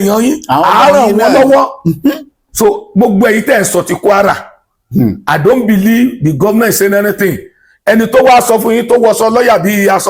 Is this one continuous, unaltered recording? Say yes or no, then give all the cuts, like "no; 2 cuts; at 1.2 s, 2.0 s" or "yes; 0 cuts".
no; 1 cut; at 2.4 s